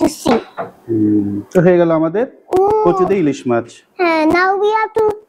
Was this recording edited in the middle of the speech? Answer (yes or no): no